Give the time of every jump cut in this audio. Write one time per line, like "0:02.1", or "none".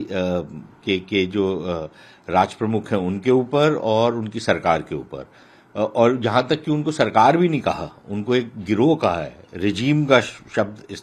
none